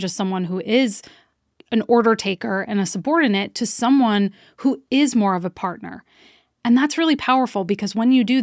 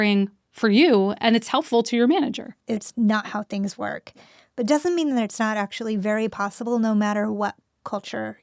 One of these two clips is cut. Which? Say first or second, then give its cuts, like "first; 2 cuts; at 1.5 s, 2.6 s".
second; 1 cut; at 2.6 s